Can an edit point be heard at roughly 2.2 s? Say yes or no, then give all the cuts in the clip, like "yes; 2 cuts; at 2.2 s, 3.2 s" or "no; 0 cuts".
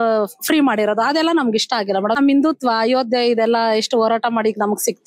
yes; 1 cut; at 2.2 s